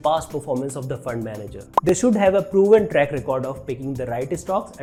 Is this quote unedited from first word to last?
yes; 0 cuts

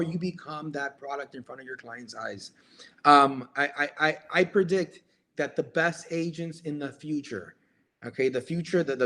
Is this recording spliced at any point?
no; 0 cuts

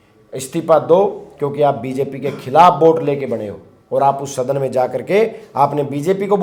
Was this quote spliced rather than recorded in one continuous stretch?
no; 0 cuts

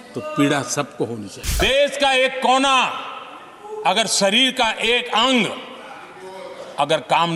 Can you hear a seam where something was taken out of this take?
yes; 1 cut; at 1.6 s

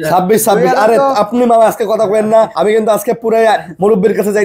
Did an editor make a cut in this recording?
yes; 1 cut; at 2.5 s

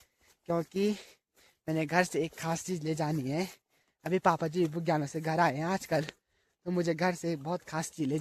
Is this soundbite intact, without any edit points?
yes; 0 cuts

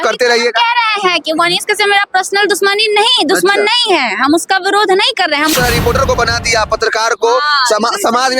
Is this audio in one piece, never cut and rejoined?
no; 1 cut; at 5.5 s

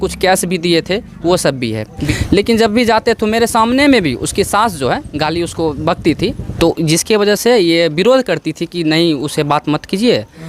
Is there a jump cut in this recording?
yes; 2 cuts; at 2.0 s, 6.5 s

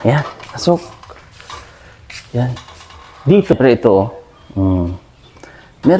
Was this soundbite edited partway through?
yes; 1 cut; at 3.5 s

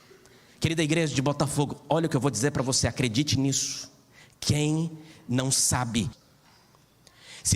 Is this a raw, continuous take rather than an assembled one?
no; 1 cut; at 6.2 s

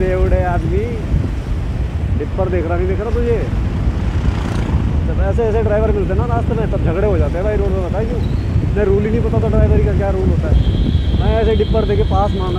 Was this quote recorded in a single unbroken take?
yes; 0 cuts

